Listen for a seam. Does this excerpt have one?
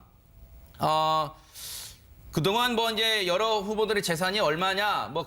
no; 0 cuts

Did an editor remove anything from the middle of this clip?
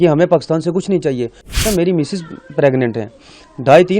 yes; 1 cut; at 1.6 s

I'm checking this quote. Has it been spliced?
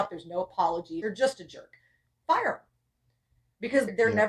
yes; 1 cut; at 1.0 s

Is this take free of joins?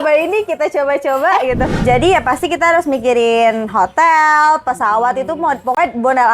no; 1 cut; at 1.7 s

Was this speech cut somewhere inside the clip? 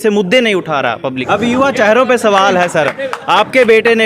yes; 1 cut; at 1.2 s

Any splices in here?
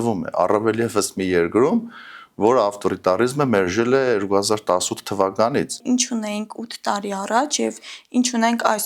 yes; 1 cut; at 5.8 s

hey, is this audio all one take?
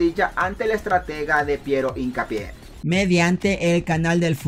yes; 0 cuts

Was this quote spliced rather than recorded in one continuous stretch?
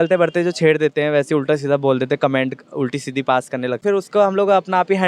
yes; 1 cut; at 3.8 s

